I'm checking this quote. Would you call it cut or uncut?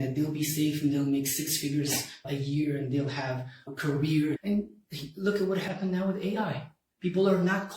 cut